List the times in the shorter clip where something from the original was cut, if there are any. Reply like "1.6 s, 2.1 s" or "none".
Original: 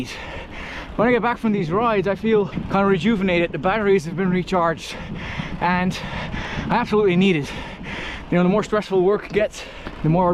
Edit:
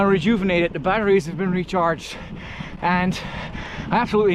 none